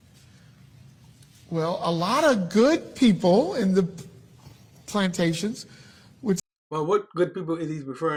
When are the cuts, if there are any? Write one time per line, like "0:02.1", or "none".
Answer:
none